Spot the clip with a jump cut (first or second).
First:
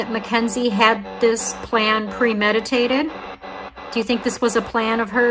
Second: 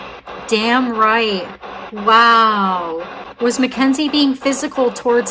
second